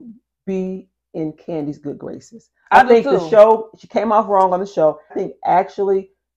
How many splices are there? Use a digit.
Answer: 1